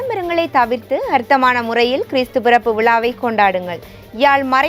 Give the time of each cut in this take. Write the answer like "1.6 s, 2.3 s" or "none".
none